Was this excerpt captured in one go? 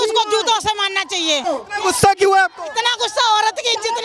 no; 1 cut; at 1.4 s

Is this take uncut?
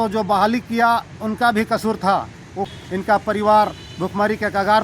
no; 1 cut; at 2.7 s

